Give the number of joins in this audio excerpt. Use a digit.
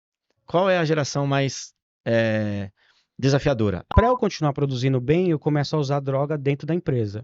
1